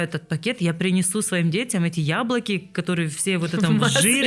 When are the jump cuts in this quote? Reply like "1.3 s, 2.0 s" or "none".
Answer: none